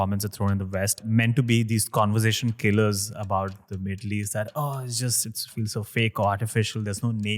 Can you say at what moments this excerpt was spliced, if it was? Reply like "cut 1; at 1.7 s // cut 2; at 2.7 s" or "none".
cut 1; at 1.0 s

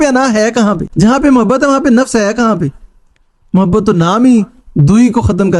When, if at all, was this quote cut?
none

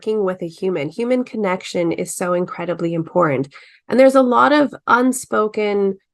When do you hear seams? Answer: none

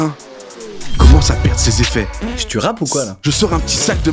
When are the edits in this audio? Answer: cut 1; at 3.1 s

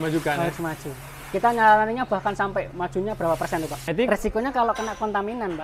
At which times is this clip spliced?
cut 1; at 3.8 s

